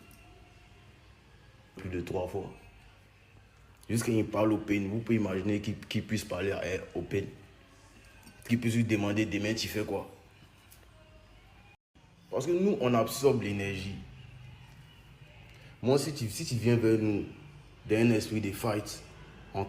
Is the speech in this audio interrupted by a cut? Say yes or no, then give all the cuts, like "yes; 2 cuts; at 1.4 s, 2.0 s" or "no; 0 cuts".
yes; 2 cuts; at 1.7 s, 11.8 s